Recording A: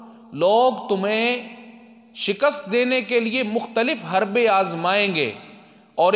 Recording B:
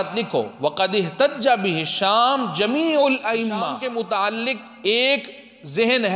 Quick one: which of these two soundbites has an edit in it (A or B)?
B